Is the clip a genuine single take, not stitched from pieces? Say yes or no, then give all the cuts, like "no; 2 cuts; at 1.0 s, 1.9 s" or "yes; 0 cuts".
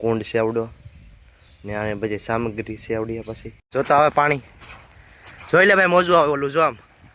no; 1 cut; at 3.5 s